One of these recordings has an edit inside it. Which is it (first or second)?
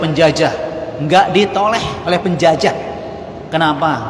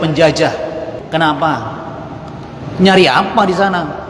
second